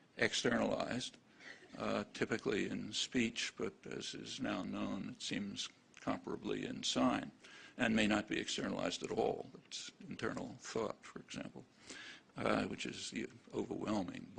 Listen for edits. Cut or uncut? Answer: uncut